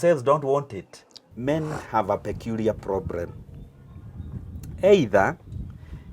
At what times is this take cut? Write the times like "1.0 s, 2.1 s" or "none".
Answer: 1.2 s